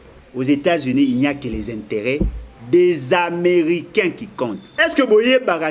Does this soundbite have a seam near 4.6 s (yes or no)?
yes